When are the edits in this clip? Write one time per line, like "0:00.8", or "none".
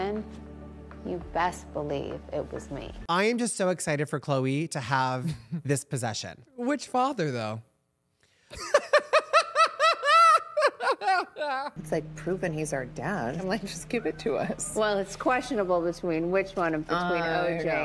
0:03.0